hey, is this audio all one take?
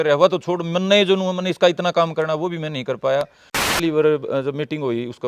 no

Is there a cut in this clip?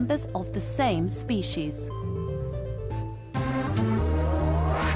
no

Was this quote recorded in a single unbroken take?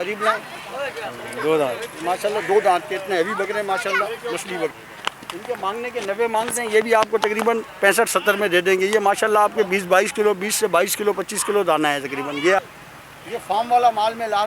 no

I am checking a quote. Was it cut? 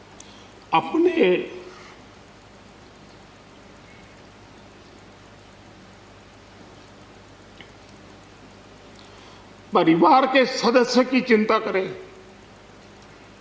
no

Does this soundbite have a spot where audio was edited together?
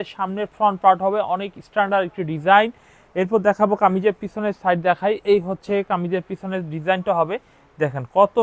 no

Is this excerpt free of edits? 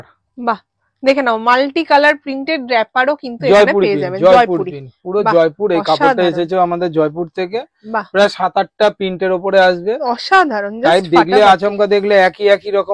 yes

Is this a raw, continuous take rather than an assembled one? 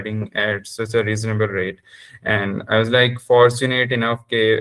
yes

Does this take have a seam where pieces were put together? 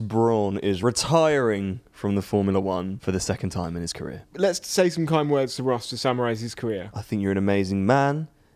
yes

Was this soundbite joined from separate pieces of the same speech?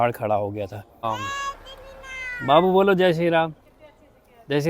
yes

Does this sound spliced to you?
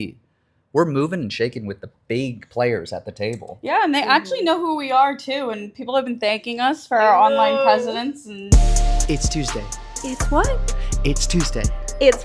yes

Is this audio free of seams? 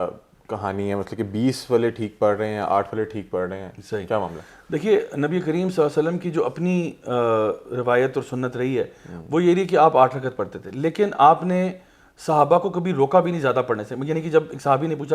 yes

